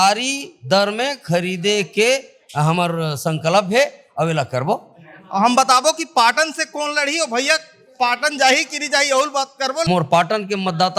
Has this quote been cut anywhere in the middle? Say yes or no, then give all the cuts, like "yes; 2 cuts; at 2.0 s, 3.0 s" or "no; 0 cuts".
yes; 1 cut; at 9.9 s